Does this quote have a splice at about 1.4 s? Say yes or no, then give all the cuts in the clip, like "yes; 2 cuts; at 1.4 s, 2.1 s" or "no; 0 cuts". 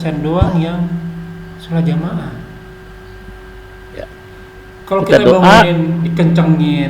no; 1 cut; at 4.1 s